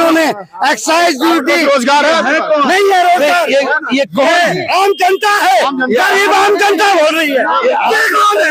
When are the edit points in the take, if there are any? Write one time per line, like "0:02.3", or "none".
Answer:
none